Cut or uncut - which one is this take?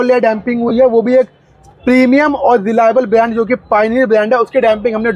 uncut